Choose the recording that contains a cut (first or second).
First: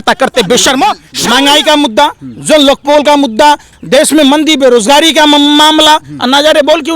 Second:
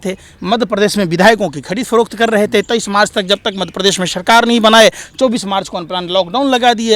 first